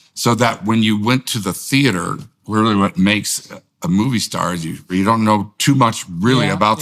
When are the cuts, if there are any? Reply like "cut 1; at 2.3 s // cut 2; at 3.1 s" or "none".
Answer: cut 1; at 4.8 s

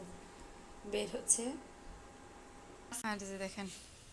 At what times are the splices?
cut 1; at 3.0 s

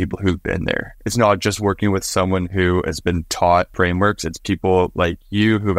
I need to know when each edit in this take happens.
cut 1; at 0.9 s // cut 2; at 3.7 s

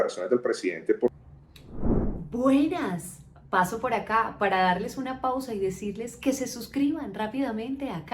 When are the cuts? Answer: none

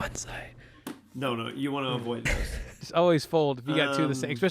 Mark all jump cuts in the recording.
cut 1; at 2.7 s

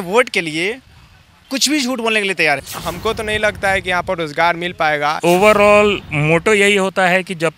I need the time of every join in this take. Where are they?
cut 1; at 2.6 s // cut 2; at 5.2 s

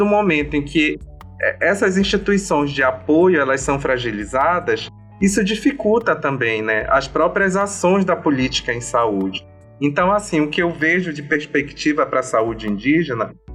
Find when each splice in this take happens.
none

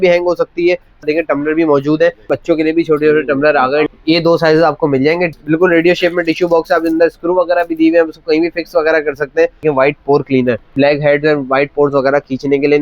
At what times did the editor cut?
cut 1; at 1.0 s // cut 2; at 2.3 s // cut 3; at 3.9 s // cut 4; at 5.3 s // cut 5; at 9.6 s // cut 6; at 10.7 s

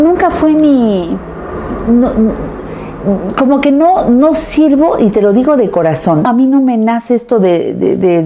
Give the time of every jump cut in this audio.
cut 1; at 6.3 s

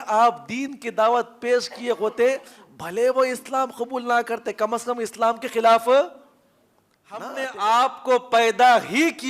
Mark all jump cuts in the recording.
cut 1; at 7.3 s

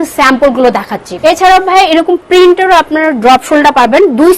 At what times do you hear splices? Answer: cut 1; at 1.0 s

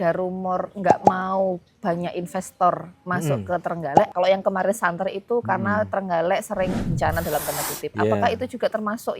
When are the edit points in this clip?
cut 1; at 4.1 s

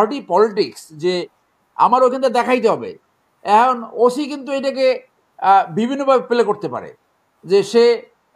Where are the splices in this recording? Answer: none

